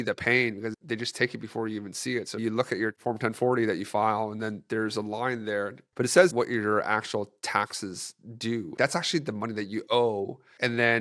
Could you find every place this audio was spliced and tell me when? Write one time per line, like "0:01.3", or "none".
0:00.8
0:02.4
0:06.3
0:08.7